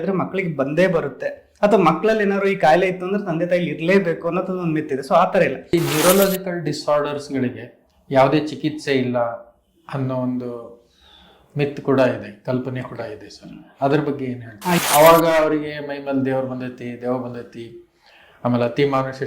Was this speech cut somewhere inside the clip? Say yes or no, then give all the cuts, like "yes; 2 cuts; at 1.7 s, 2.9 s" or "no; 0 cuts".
yes; 2 cuts; at 5.7 s, 14.8 s